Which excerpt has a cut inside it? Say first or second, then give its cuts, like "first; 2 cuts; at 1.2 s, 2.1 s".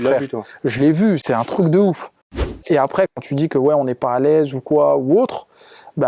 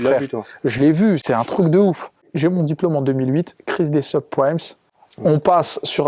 first; 1 cut; at 2.3 s